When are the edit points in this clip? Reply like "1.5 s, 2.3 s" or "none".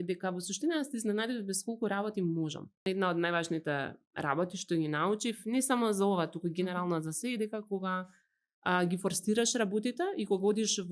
2.9 s